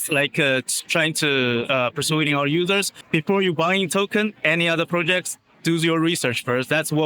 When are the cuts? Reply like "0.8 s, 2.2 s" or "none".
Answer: 3.0 s